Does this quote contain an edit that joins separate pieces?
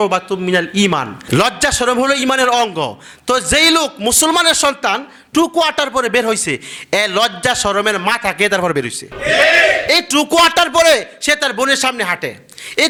no; 0 cuts

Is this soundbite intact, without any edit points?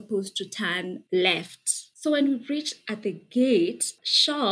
yes; 0 cuts

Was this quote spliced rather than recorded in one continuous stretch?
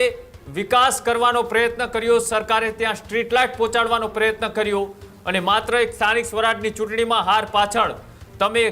no; 0 cuts

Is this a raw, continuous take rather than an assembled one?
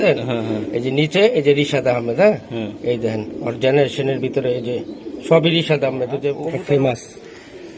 no; 1 cut; at 6.6 s

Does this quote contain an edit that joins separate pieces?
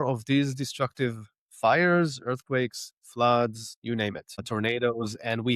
no; 0 cuts

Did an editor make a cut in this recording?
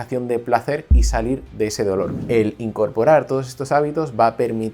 yes; 1 cut; at 2.2 s

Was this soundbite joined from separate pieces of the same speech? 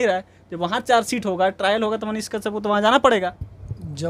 no; 0 cuts

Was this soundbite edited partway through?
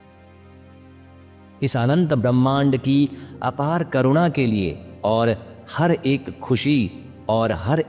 yes; 1 cut; at 1.2 s

